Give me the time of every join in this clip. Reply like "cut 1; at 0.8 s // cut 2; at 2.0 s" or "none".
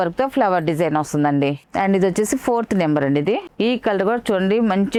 none